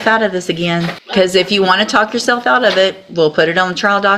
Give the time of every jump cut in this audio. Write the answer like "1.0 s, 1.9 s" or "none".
1.0 s